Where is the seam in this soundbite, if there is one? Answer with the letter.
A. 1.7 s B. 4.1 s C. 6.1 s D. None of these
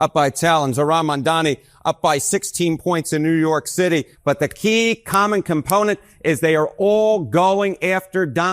B